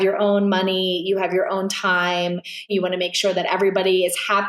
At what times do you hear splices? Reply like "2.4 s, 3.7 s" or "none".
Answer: 2.7 s